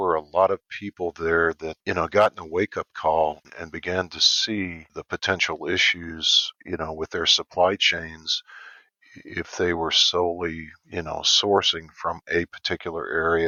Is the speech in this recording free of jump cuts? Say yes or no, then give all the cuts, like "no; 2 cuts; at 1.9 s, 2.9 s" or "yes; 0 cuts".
yes; 0 cuts